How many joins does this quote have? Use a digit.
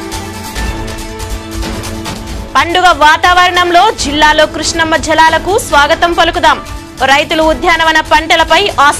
1